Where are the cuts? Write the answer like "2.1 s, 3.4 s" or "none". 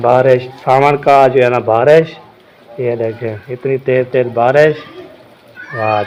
none